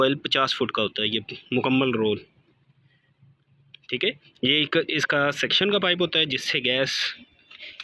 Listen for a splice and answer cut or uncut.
uncut